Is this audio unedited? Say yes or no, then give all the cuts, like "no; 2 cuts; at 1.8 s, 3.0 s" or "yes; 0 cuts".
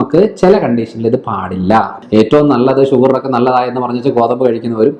no; 1 cut; at 2.0 s